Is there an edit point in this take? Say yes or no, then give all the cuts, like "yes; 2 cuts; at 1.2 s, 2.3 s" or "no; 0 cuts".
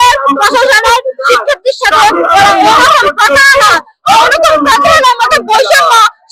no; 0 cuts